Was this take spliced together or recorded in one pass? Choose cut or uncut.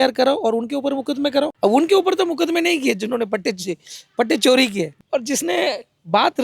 cut